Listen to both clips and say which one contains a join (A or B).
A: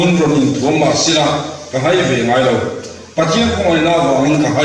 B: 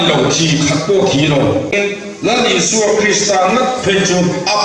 B